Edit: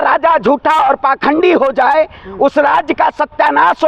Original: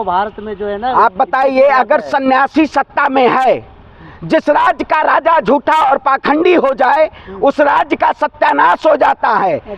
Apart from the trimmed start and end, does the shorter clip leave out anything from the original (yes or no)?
no